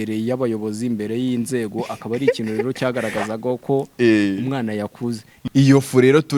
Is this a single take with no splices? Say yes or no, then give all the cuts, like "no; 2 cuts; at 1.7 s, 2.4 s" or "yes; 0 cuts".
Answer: no; 1 cut; at 5.3 s